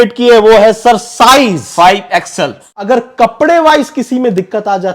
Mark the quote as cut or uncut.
cut